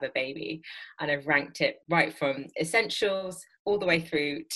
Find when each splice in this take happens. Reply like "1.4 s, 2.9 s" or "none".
1.8 s